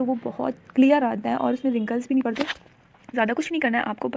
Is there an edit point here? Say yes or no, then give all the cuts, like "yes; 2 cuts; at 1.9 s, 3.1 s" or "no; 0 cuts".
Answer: no; 0 cuts